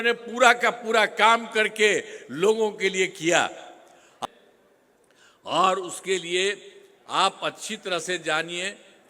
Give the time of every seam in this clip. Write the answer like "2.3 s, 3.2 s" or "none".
4.1 s